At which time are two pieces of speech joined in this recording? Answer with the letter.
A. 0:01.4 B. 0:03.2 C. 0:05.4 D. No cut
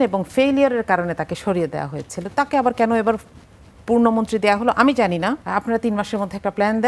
C